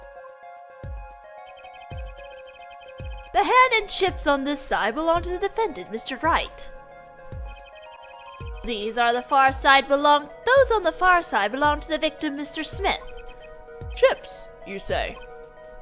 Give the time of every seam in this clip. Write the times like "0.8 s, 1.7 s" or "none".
14.9 s